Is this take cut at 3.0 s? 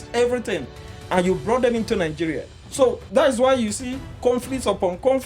yes; 1 cut; at 3.0 s

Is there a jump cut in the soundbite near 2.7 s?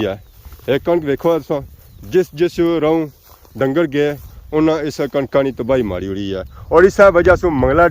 no; 1 cut; at 6.5 s

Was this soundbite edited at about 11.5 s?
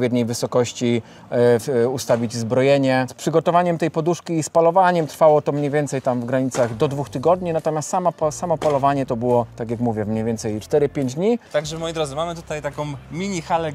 yes; 4 cuts; at 3.1 s, 9.6 s, 10.6 s, 11.5 s

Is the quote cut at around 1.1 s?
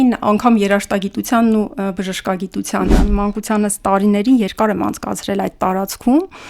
no; 1 cut; at 3.0 s

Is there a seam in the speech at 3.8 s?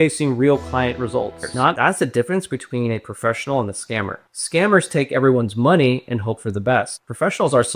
no; 1 cut; at 1.8 s

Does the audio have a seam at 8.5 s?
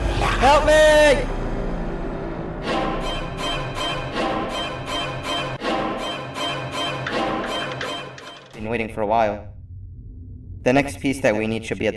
yes; 1 cut; at 8.5 s

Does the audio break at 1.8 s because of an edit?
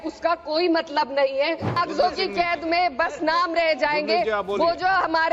yes; 1 cut; at 1.8 s

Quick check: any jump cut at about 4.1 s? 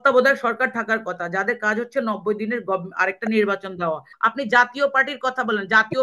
yes; 1 cut; at 4.1 s

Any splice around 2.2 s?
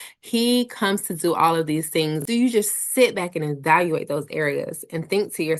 yes; 1 cut; at 2.2 s

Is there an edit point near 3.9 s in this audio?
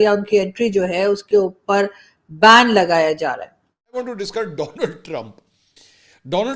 yes; 1 cut; at 3.9 s

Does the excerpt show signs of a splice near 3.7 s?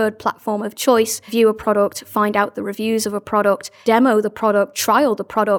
yes; 2 cuts; at 1.3 s, 3.7 s

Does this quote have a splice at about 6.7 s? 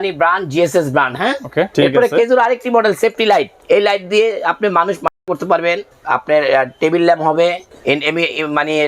no; 2 cuts; at 1.7 s, 3.5 s

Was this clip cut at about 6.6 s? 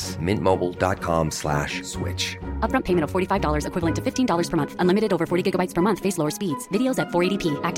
no; 0 cuts

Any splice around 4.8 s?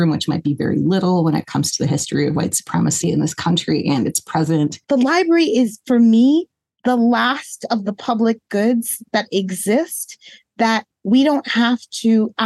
yes; 1 cut; at 4.8 s

